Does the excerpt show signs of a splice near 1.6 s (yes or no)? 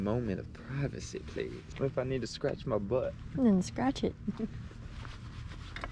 yes